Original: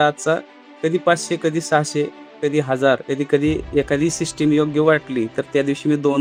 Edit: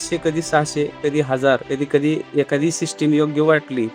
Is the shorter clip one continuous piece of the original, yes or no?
no